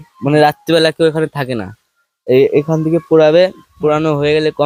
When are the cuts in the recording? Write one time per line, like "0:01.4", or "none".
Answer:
none

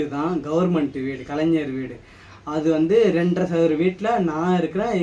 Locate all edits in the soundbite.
none

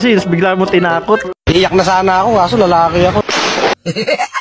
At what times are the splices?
none

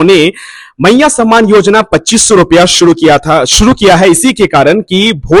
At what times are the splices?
none

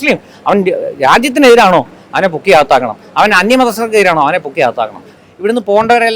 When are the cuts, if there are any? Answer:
0:05.1

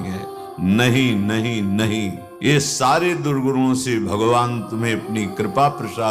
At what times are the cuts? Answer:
0:02.5

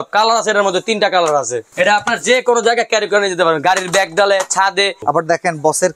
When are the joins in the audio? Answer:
0:01.6
0:05.0

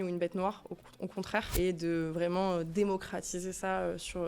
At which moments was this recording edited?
0:01.5

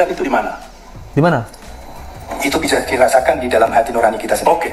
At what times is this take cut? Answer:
none

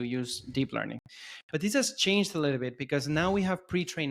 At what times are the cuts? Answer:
none

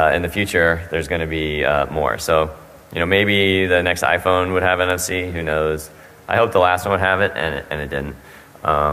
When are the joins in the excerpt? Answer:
none

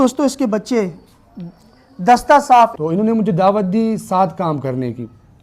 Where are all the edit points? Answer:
0:02.7

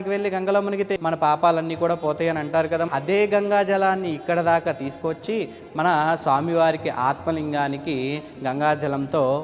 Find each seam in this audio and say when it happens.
0:00.9
0:02.9

